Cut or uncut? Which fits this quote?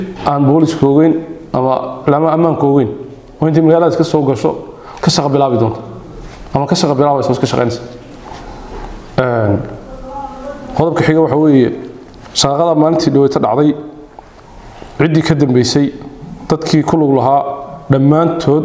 uncut